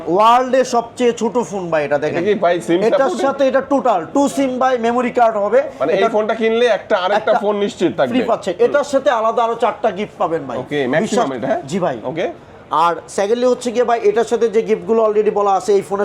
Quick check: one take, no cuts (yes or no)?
yes